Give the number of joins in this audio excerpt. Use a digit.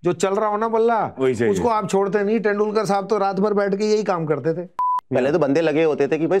1